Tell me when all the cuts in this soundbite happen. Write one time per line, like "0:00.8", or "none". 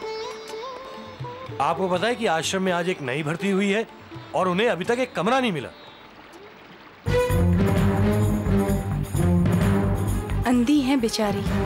0:07.0